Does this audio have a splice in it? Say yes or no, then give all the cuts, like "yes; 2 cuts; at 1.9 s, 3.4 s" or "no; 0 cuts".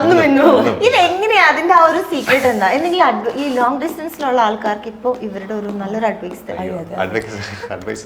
no; 0 cuts